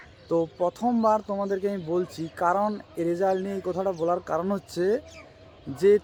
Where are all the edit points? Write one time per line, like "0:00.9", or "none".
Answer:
none